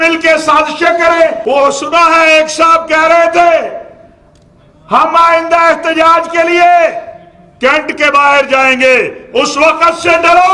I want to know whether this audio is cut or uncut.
cut